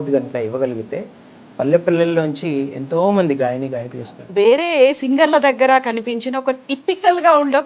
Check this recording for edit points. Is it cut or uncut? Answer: cut